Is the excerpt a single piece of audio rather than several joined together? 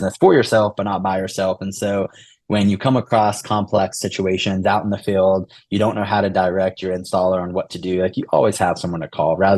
yes; 0 cuts

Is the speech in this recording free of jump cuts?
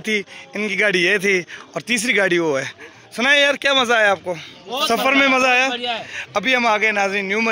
yes; 0 cuts

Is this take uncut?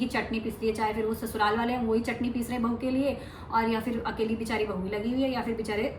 yes; 0 cuts

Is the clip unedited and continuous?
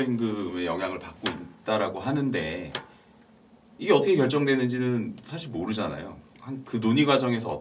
yes; 0 cuts

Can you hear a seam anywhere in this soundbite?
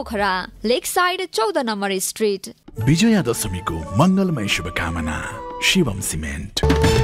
yes; 1 cut; at 2.5 s

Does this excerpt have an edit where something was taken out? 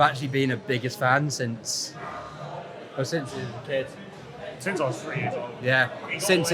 no; 0 cuts

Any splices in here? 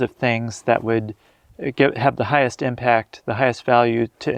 no; 0 cuts

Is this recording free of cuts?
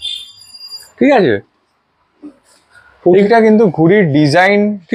yes; 0 cuts

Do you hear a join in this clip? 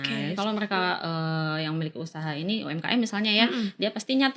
no; 0 cuts

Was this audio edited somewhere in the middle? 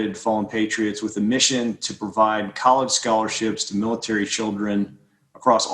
no; 0 cuts

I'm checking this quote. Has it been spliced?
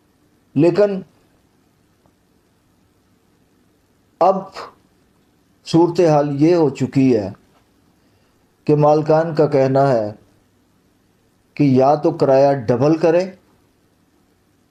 no; 0 cuts

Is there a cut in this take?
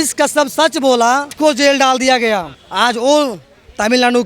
yes; 2 cuts; at 1.3 s, 2.6 s

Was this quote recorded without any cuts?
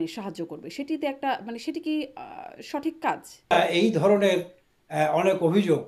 no; 1 cut; at 3.6 s

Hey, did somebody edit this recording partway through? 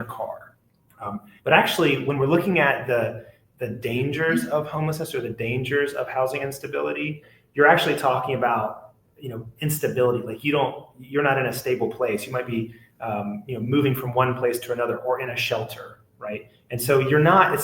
yes; 1 cut; at 7.3 s

